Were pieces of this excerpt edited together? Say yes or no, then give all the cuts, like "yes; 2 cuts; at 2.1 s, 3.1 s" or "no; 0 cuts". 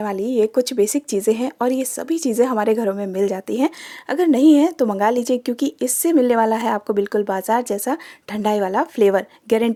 no; 0 cuts